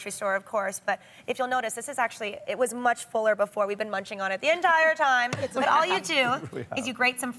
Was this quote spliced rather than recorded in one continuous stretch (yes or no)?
yes